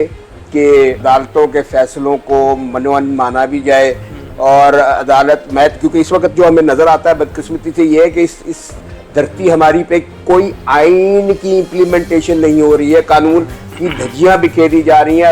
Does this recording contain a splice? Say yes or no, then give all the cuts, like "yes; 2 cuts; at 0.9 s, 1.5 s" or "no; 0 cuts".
yes; 1 cut; at 1.0 s